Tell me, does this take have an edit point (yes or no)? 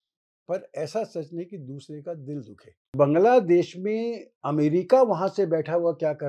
yes